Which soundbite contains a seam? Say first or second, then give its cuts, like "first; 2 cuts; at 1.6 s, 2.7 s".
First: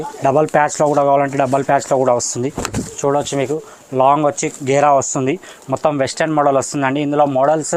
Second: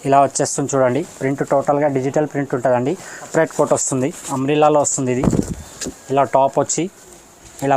second; 1 cut; at 3.3 s